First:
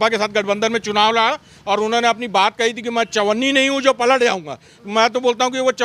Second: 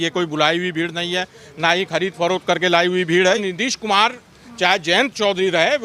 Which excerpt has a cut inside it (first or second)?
second